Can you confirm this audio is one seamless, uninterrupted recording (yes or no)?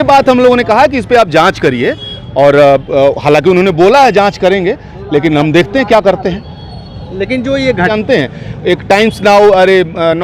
no